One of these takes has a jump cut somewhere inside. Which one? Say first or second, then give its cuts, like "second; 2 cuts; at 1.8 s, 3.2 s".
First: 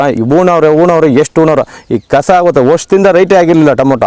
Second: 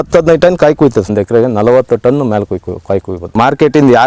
second; 2 cuts; at 1.1 s, 3.2 s